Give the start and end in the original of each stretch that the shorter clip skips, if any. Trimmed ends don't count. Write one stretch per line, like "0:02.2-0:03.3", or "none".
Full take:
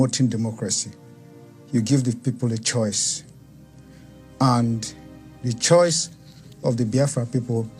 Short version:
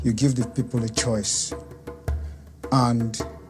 none